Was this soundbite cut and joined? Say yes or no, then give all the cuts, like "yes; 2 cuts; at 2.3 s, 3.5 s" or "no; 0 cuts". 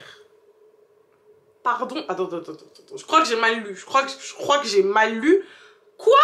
no; 0 cuts